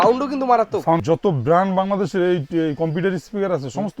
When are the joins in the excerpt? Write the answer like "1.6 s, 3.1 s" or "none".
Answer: 1.0 s